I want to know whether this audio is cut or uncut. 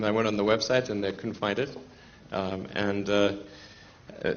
cut